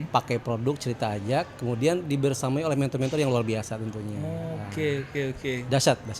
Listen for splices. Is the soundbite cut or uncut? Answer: uncut